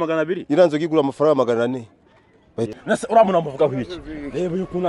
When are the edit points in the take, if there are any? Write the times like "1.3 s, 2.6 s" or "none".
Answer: 2.7 s